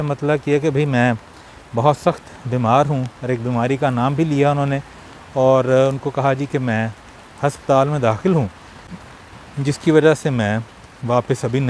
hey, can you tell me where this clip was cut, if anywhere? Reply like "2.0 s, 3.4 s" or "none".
none